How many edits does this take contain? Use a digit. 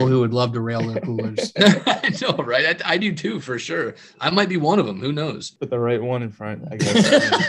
1